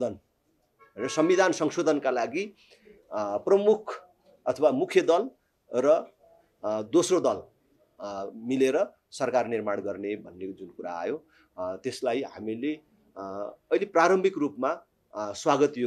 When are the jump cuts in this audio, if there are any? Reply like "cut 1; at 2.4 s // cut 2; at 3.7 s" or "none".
none

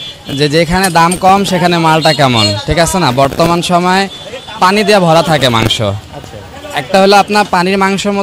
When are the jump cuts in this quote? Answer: none

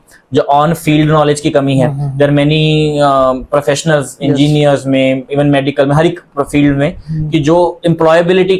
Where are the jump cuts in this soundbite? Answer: none

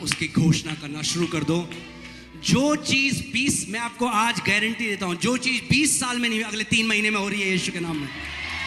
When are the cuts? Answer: none

